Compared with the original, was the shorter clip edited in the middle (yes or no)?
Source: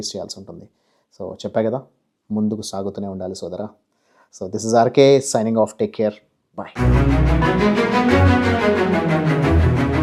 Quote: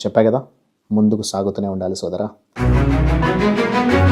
yes